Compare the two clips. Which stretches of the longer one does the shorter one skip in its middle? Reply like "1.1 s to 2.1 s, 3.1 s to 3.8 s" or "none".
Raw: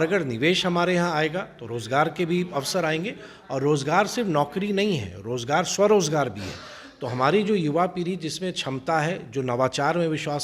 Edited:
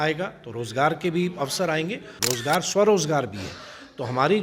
3.3 s to 5.2 s